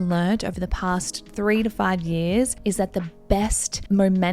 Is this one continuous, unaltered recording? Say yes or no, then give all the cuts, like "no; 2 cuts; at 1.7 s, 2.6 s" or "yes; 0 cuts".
no; 1 cut; at 2.6 s